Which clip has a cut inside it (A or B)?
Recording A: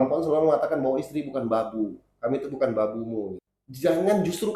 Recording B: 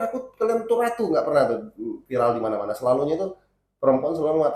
A